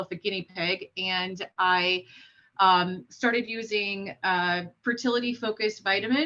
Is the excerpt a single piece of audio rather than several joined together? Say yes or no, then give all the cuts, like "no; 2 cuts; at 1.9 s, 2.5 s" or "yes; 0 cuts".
yes; 0 cuts